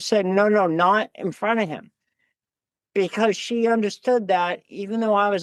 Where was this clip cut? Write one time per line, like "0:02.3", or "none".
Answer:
none